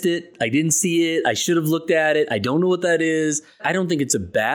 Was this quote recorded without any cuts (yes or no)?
no